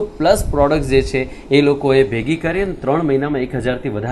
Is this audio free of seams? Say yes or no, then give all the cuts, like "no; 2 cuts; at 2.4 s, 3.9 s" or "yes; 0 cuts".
yes; 0 cuts